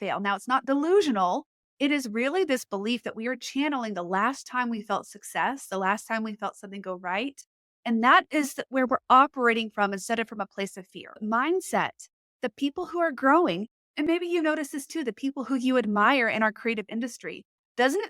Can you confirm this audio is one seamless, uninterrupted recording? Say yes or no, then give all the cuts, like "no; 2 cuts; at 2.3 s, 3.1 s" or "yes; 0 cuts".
no; 1 cut; at 11.2 s